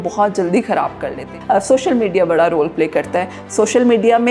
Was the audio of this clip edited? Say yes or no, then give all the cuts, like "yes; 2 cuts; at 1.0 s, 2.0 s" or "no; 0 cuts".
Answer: yes; 1 cut; at 1.2 s